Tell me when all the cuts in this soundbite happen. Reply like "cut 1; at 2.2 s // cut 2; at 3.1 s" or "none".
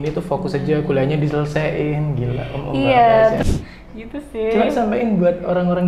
cut 1; at 3.4 s